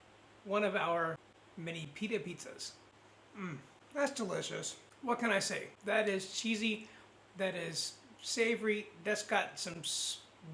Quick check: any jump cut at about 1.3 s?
no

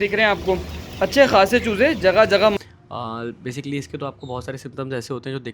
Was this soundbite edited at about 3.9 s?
no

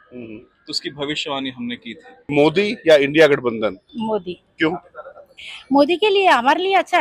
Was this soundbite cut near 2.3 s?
yes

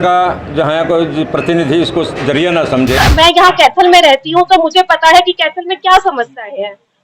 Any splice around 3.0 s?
yes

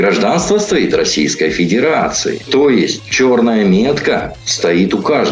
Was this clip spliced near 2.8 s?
yes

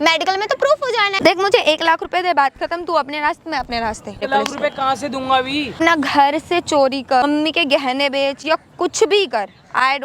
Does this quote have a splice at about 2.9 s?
no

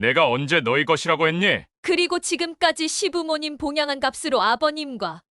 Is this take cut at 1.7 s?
yes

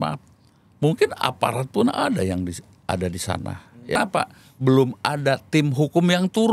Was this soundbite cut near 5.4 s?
no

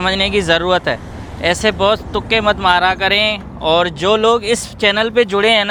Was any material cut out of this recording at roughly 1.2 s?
no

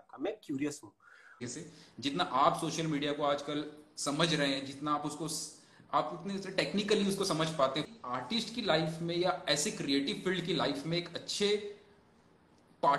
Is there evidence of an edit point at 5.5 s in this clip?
no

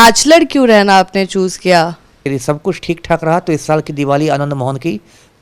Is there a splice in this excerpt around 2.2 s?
yes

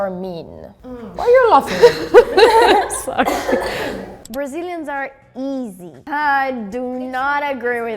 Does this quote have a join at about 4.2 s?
yes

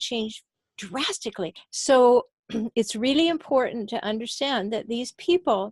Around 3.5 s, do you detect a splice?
no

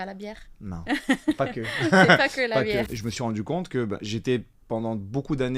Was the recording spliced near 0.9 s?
no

